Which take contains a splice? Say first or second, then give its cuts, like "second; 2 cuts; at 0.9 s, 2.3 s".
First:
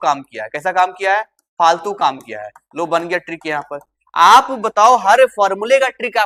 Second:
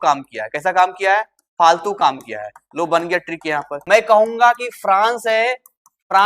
second; 1 cut; at 3.7 s